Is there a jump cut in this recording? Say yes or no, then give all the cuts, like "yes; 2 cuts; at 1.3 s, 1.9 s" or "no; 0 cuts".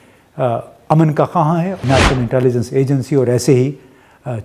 yes; 1 cut; at 1.7 s